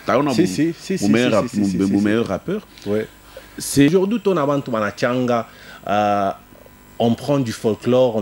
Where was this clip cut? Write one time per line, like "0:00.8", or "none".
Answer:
0:03.9